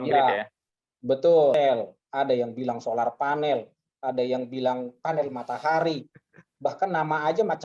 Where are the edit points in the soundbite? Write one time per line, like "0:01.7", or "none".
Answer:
0:01.5